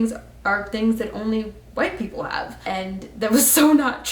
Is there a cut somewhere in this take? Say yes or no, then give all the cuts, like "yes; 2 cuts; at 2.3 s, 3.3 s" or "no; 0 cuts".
yes; 1 cut; at 2.5 s